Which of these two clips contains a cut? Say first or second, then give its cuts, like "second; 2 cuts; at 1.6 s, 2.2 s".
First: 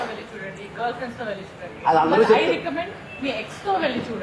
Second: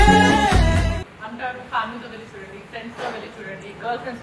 second; 1 cut; at 1.1 s